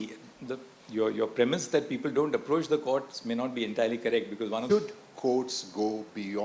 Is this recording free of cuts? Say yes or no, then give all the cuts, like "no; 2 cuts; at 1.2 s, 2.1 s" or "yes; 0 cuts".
no; 1 cut; at 4.6 s